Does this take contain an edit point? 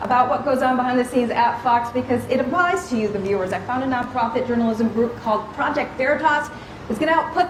no; 0 cuts

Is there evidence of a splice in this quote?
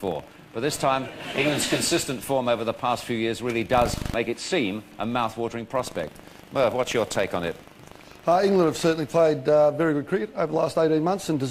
no; 0 cuts

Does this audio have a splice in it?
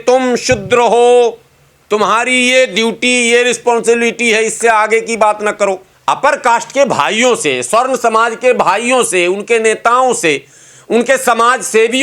yes; 1 cut; at 5.9 s

